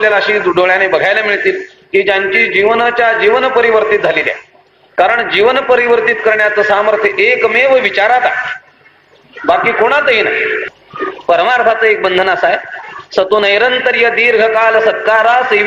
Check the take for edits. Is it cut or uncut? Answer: cut